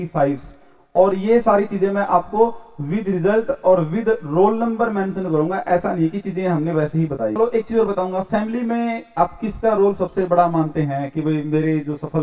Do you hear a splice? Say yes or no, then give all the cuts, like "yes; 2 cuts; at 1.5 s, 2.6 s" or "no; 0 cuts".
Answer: yes; 1 cut; at 7.4 s